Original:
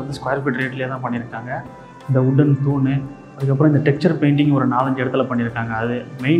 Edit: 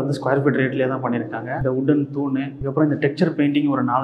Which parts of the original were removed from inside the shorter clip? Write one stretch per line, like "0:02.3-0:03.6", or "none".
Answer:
0:01.5-0:02.0
0:03.1-0:03.4